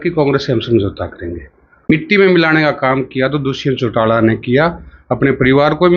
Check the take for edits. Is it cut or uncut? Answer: cut